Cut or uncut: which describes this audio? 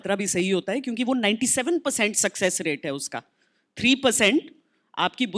uncut